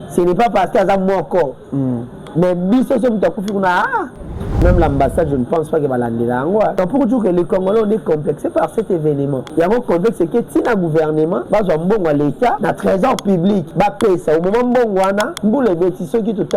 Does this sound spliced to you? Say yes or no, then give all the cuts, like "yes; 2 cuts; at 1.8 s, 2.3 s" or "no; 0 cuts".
yes; 7 cuts; at 4.6 s, 6.7 s, 9.4 s, 11.4 s, 12.6 s, 13.7 s, 15.3 s